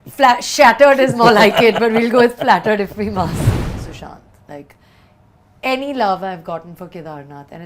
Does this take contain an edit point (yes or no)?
yes